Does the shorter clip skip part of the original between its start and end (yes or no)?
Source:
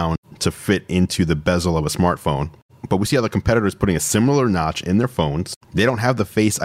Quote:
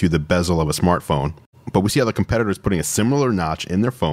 no